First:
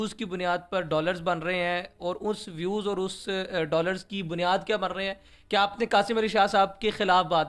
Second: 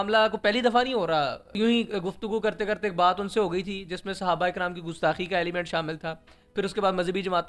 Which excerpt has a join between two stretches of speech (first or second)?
second